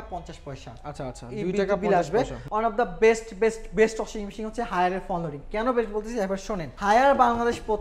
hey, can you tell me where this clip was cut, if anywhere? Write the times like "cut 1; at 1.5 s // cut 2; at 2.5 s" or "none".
cut 1; at 2.4 s // cut 2; at 6.7 s